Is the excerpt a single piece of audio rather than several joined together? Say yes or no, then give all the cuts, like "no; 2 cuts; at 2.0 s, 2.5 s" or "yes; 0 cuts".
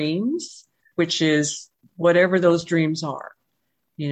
yes; 0 cuts